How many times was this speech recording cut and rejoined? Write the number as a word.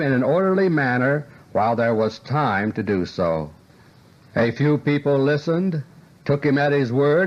zero